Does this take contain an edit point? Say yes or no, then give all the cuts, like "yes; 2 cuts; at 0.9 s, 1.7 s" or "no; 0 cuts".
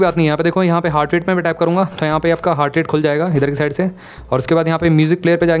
no; 0 cuts